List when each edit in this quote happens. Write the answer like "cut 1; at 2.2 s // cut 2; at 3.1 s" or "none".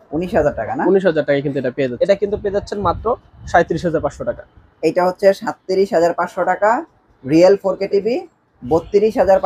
cut 1; at 1.9 s